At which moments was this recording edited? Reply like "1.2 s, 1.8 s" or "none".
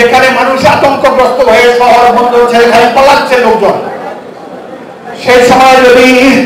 none